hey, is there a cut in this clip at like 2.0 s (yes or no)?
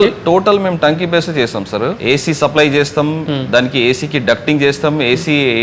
yes